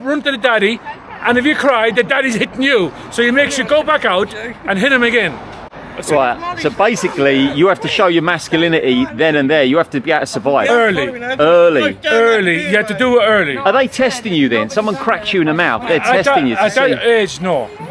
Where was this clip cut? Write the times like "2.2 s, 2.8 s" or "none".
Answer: none